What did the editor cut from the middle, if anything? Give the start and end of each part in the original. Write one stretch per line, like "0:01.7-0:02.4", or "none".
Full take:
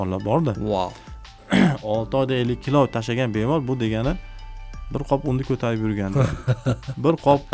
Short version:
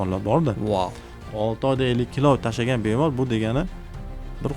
0:01.3-0:01.8